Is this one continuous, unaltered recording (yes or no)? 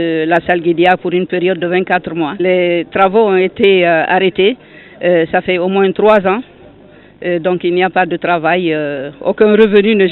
no